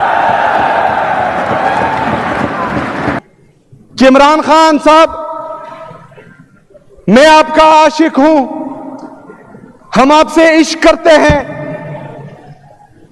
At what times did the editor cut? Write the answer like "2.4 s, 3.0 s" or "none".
3.2 s